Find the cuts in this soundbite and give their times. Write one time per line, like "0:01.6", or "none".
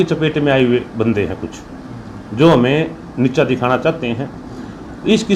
none